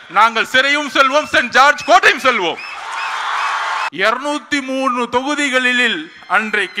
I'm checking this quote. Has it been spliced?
yes; 1 cut; at 3.9 s

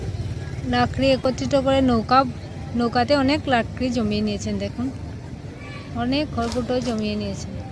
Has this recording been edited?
no; 0 cuts

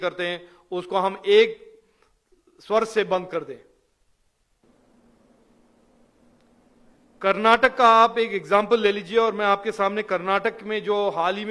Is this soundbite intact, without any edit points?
no; 1 cut; at 4.6 s

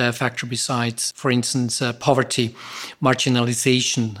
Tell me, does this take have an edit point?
yes; 1 cut; at 1.0 s

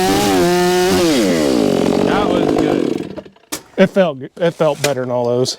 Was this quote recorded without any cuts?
no; 1 cut; at 3.6 s

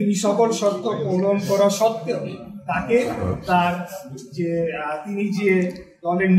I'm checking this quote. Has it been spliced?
no; 0 cuts

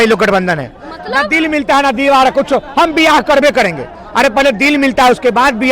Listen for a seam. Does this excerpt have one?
no; 0 cuts

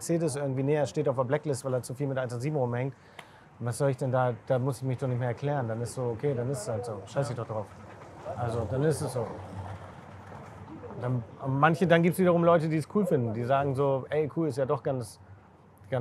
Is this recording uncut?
yes; 0 cuts

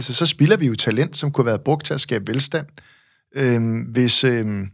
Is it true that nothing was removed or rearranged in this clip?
yes; 0 cuts

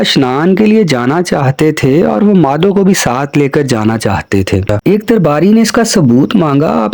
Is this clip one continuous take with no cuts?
no; 1 cut; at 4.7 s

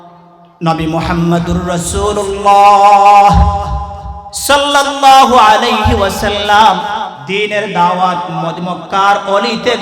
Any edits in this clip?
yes; 1 cut; at 7.2 s

